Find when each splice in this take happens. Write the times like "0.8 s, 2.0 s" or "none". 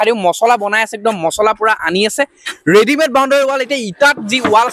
none